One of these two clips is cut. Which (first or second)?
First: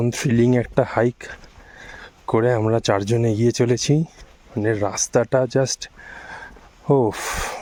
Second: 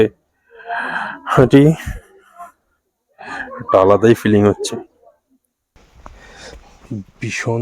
second